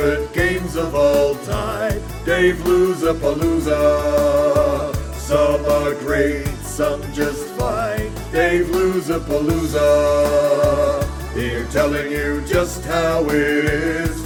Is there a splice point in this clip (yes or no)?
no